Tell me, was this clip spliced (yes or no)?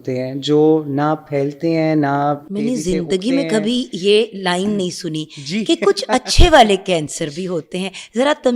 no